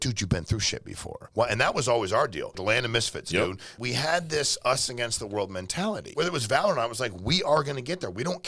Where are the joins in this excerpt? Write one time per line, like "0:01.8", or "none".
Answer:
0:01.2
0:02.6
0:03.8
0:06.1